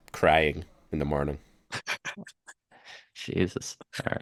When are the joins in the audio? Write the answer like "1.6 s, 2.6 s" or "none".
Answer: none